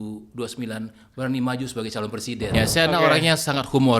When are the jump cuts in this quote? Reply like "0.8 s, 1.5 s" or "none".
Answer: 2.5 s